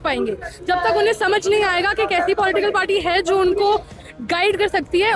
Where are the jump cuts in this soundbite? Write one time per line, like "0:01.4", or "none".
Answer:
none